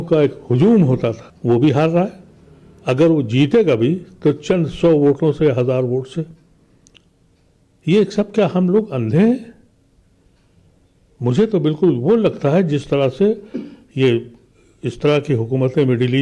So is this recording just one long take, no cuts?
yes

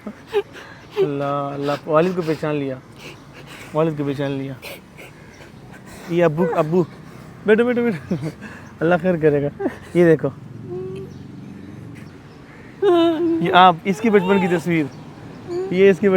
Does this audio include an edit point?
yes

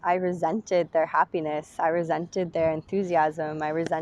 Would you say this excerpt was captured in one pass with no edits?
yes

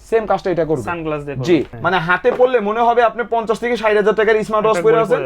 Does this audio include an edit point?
yes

